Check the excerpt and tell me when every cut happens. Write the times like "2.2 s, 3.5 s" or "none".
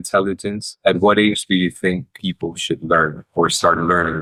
none